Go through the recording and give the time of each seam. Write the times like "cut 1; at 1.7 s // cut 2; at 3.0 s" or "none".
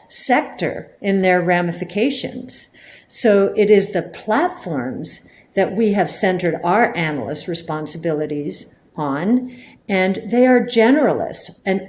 none